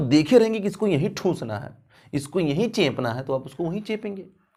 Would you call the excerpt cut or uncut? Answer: uncut